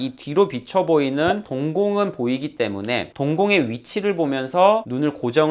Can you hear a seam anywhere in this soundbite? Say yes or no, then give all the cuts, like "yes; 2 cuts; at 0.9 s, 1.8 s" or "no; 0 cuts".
yes; 1 cut; at 3.1 s